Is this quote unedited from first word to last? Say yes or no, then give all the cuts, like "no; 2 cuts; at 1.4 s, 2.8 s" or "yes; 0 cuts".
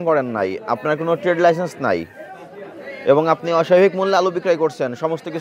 yes; 0 cuts